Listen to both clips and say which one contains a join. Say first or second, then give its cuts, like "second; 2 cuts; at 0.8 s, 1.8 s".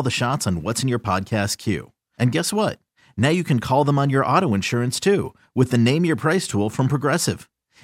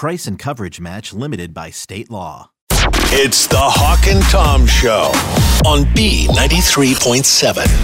second; 1 cut; at 2.5 s